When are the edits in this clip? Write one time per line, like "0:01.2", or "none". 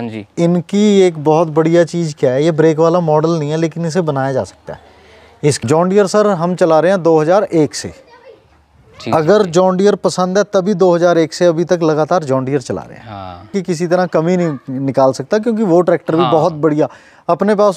0:05.6
0:13.5